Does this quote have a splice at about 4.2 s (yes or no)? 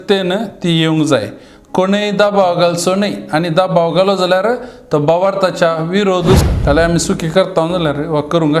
no